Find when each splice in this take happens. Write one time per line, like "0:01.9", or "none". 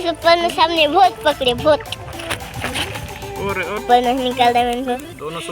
0:03.8